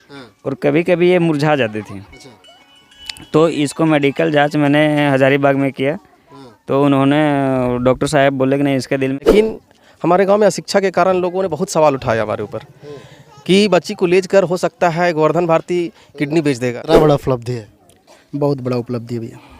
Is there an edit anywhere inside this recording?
yes; 2 cuts; at 9.3 s, 16.8 s

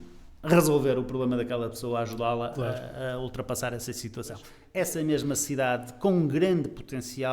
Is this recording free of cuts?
no; 1 cut; at 4.5 s

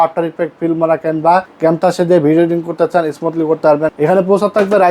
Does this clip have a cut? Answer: yes; 2 cuts; at 1.5 s, 3.9 s

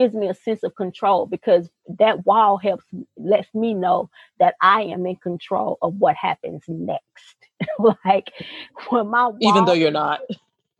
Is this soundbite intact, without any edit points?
yes; 0 cuts

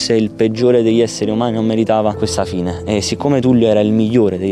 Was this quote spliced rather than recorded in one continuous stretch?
yes; 1 cut; at 2.2 s

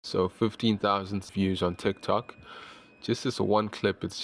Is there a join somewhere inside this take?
yes; 1 cut; at 1.2 s

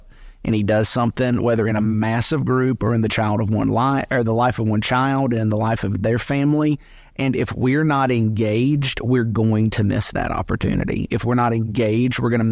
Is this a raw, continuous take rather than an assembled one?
yes; 0 cuts

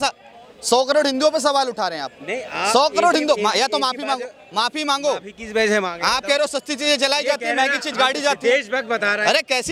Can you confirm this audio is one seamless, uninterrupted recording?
yes; 0 cuts

